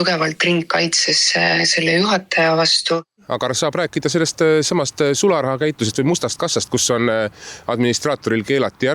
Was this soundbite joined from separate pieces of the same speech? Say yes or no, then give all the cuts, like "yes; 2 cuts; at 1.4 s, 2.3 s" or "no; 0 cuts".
yes; 1 cut; at 3.2 s